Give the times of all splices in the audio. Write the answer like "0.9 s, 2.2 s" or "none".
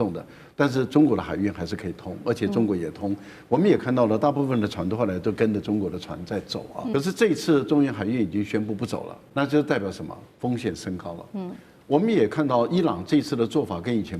6.9 s, 9.2 s